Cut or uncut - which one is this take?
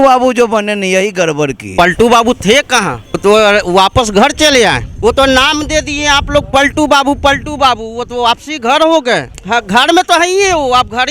cut